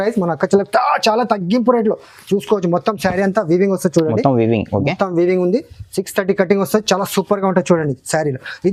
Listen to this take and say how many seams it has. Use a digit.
0